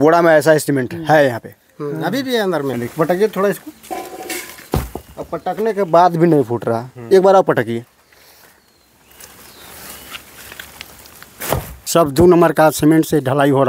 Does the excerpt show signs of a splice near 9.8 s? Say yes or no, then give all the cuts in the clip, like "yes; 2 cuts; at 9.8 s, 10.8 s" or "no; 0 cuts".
no; 2 cuts; at 2.7 s, 11.8 s